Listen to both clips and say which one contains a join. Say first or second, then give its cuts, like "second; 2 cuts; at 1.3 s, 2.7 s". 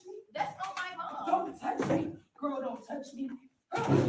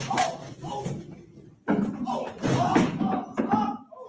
first; 1 cut; at 1.4 s